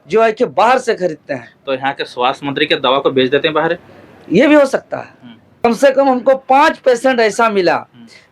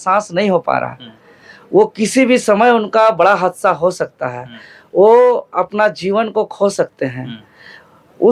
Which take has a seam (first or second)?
first